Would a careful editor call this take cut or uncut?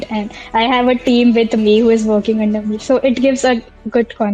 uncut